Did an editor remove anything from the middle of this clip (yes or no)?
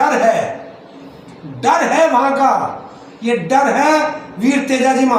no